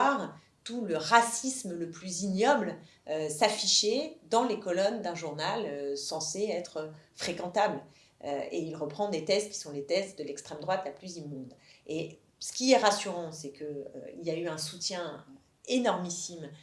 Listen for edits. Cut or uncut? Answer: uncut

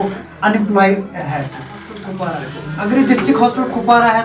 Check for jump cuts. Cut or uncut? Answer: cut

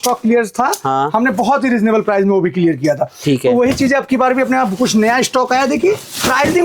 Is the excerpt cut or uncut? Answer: uncut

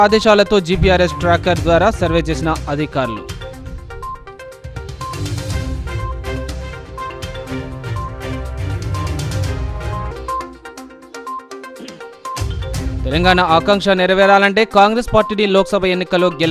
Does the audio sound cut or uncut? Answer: uncut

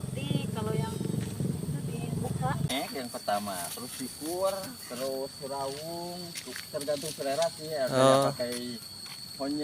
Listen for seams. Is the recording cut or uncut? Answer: cut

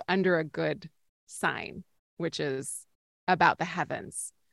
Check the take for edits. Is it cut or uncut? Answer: uncut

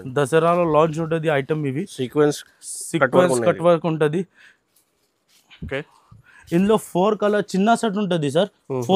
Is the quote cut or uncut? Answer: uncut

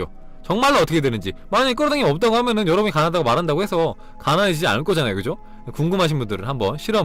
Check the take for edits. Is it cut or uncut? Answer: uncut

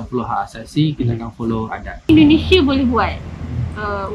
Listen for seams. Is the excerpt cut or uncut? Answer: cut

